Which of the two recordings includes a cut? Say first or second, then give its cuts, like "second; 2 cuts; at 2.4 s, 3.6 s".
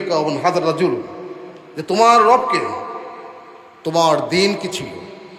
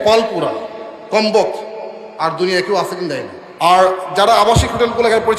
second; 1 cut; at 3.4 s